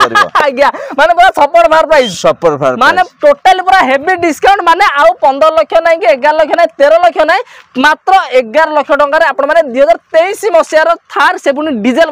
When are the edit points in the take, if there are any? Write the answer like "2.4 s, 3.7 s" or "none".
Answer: none